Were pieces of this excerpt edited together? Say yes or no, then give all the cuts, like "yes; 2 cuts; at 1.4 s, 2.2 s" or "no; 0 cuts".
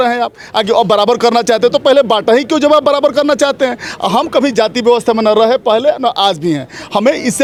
no; 0 cuts